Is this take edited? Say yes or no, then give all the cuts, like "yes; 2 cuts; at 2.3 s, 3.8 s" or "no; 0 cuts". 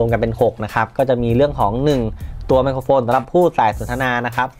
no; 0 cuts